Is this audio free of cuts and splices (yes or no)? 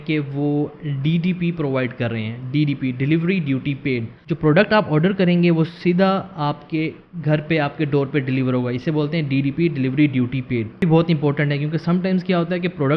no